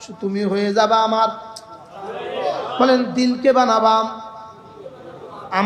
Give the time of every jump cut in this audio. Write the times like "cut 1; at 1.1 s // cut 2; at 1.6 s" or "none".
none